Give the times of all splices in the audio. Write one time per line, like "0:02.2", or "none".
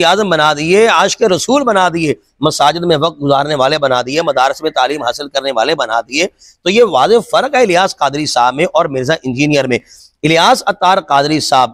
none